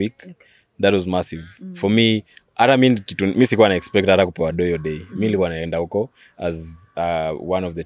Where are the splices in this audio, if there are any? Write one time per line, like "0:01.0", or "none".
none